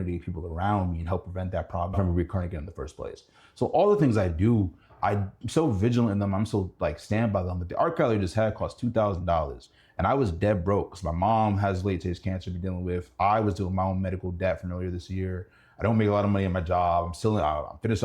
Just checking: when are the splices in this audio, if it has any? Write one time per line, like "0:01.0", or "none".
0:01.9